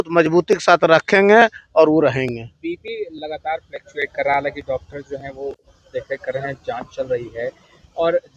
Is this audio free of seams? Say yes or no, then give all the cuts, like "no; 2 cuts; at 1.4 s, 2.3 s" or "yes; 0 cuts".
yes; 0 cuts